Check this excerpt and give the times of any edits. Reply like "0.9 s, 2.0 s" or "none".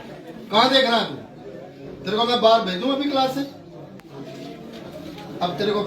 4.0 s